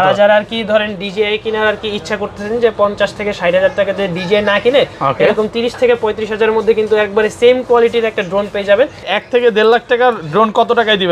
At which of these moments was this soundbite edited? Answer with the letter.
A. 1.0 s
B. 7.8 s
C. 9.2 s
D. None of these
C